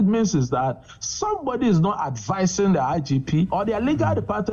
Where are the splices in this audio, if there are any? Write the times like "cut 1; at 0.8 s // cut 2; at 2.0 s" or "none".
cut 1; at 3.5 s